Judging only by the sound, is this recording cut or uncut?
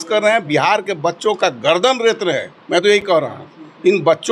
uncut